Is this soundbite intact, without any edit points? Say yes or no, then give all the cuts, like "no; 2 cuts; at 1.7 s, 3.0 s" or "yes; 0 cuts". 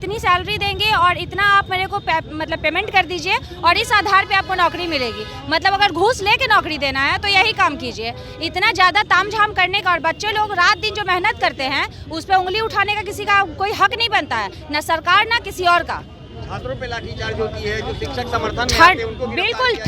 yes; 0 cuts